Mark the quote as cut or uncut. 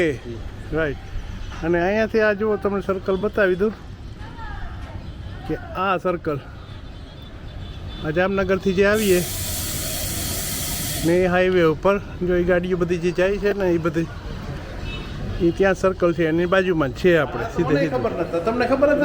cut